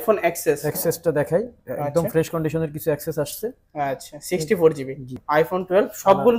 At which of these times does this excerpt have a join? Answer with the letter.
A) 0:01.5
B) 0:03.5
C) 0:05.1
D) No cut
C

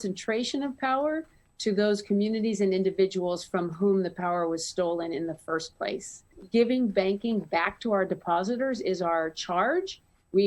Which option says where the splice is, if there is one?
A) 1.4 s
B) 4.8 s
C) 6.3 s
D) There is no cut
C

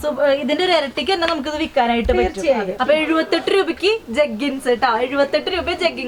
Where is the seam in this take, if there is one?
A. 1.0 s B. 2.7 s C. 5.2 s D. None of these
B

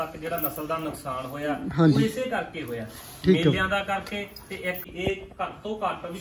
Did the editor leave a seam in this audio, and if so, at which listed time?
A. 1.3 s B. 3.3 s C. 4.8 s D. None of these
C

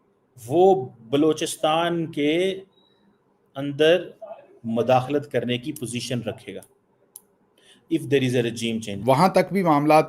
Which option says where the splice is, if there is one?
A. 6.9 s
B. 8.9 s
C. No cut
B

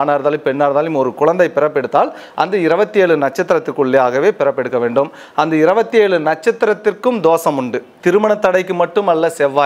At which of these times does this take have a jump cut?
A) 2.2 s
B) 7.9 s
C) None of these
B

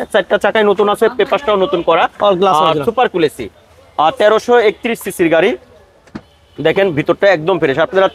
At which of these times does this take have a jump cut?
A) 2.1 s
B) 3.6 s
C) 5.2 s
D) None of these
D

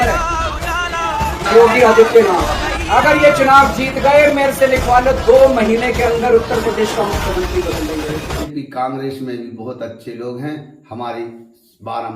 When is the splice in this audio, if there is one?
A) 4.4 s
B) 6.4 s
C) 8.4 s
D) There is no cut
C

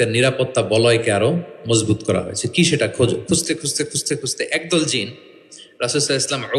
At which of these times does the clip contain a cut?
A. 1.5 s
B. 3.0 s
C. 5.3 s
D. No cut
D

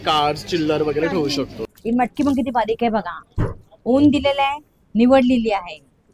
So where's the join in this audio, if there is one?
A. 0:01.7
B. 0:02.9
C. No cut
A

